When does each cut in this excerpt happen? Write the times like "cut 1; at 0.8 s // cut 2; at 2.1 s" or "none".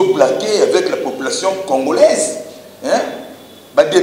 none